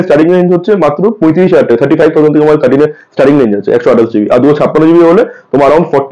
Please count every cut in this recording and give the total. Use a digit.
0